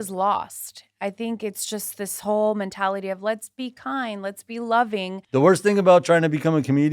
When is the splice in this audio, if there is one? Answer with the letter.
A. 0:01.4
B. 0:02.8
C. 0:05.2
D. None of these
C